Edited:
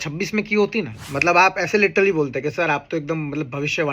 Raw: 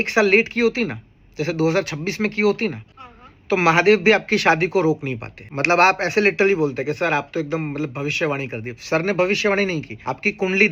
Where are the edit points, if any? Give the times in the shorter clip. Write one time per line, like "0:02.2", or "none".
0:01.0